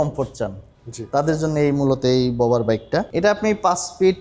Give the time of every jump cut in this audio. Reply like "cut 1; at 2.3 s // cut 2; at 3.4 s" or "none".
cut 1; at 3.1 s